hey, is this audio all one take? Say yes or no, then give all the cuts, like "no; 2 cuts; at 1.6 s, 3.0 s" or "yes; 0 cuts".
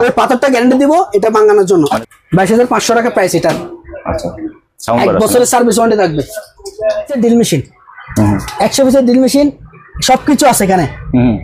no; 2 cuts; at 2.0 s, 7.1 s